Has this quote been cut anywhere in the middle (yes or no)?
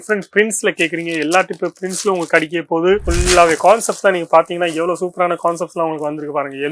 yes